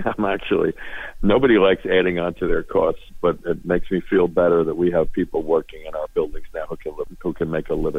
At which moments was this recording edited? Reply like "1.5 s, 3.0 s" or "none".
7.1 s